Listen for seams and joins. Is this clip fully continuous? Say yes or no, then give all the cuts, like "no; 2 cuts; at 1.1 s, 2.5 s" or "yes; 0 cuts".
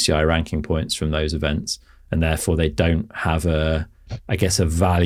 yes; 0 cuts